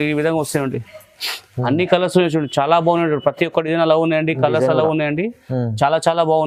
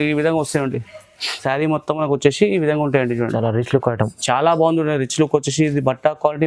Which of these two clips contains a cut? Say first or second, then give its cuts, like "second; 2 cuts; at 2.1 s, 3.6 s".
second; 1 cut; at 1.4 s